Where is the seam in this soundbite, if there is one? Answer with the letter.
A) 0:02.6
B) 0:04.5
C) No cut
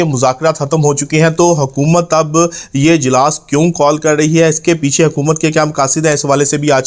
C